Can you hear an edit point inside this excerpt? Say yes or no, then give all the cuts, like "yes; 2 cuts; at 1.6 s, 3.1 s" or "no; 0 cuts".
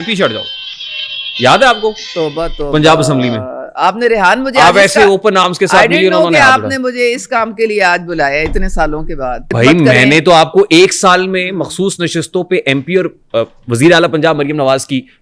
yes; 1 cut; at 9.5 s